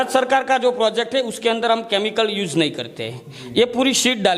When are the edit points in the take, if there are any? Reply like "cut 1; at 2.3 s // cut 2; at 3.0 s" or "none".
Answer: none